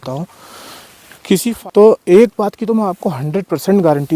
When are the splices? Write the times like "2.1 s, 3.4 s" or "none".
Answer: 1.5 s